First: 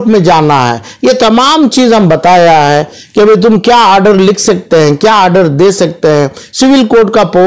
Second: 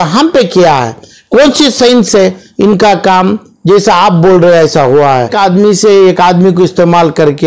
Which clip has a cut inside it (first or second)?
second